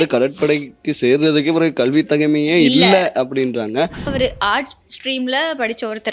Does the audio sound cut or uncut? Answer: cut